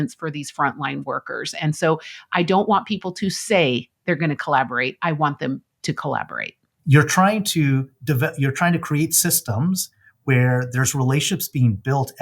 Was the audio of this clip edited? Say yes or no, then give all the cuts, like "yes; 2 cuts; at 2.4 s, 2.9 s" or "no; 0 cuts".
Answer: yes; 1 cut; at 6.7 s